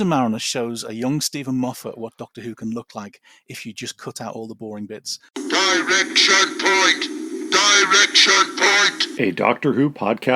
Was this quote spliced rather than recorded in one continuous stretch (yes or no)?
yes